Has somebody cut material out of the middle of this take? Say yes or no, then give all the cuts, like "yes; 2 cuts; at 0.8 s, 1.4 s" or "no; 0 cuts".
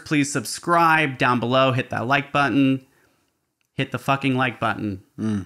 no; 0 cuts